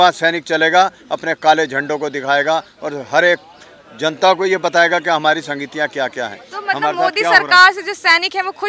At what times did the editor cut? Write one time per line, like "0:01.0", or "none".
none